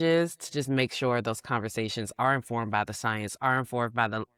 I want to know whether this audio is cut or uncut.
uncut